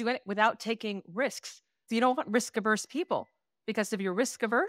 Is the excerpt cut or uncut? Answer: cut